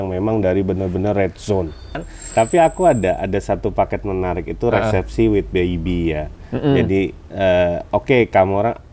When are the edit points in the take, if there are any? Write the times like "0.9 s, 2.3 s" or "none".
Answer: 2.0 s